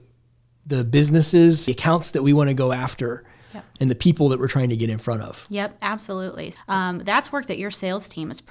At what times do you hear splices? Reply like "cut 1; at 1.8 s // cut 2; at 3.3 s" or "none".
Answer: cut 1; at 1.7 s // cut 2; at 6.5 s